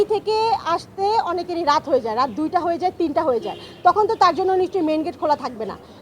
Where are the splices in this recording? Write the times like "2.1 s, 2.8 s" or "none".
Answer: none